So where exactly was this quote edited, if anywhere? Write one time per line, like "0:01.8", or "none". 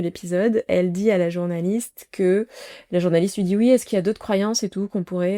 none